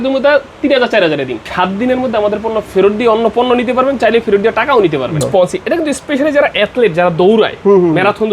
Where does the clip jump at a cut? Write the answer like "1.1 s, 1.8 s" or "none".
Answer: 1.4 s, 5.2 s